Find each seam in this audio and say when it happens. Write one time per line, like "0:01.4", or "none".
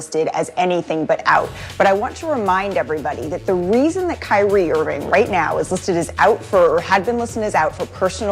none